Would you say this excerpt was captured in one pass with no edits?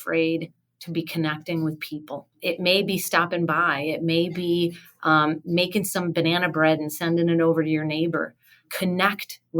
no; 2 cuts; at 2.4 s, 8.7 s

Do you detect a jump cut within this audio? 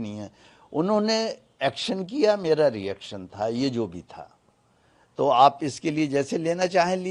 no; 0 cuts

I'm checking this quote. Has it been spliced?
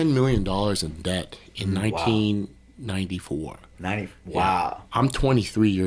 no; 0 cuts

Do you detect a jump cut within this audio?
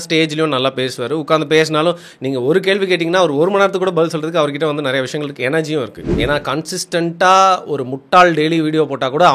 yes; 1 cut; at 6.0 s

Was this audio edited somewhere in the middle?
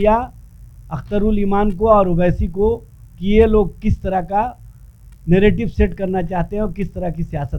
no; 0 cuts

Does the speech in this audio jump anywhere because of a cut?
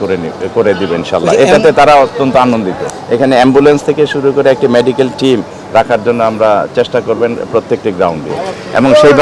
yes; 2 cuts; at 2.9 s, 8.3 s

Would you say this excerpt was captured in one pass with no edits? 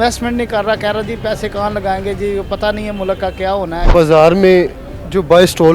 no; 1 cut; at 3.8 s

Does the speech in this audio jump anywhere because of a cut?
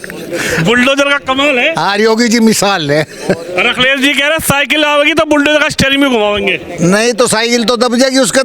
no; 0 cuts

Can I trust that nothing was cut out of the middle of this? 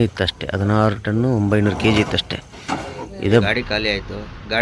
no; 1 cut; at 3.4 s

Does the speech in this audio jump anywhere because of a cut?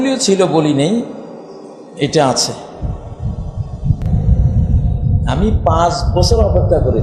yes; 1 cut; at 4.0 s

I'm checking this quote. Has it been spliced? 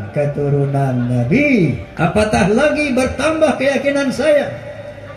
yes; 1 cut; at 1.8 s

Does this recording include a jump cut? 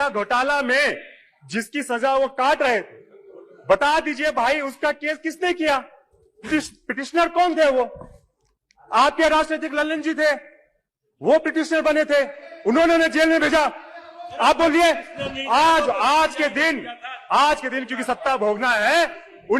no; 0 cuts

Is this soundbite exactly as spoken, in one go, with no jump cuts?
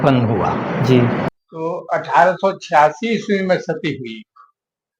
no; 1 cut; at 1.3 s

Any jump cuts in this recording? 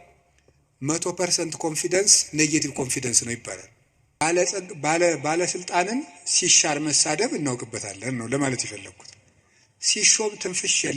yes; 1 cut; at 4.2 s

